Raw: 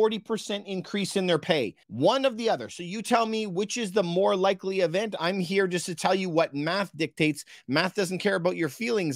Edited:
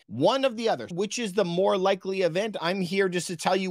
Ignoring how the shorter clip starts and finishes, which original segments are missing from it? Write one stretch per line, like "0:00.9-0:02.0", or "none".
0:02.7-0:03.5